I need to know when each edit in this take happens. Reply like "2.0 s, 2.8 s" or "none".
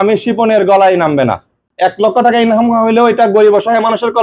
1.6 s